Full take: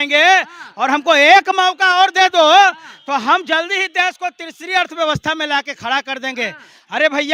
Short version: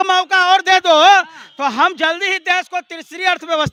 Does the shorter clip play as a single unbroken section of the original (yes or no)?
yes